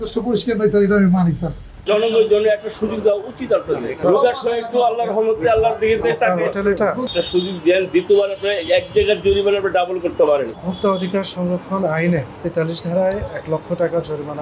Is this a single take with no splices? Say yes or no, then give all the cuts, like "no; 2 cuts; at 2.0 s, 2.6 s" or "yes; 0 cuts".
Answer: no; 4 cuts; at 4.0 s, 7.0 s, 10.5 s, 12.5 s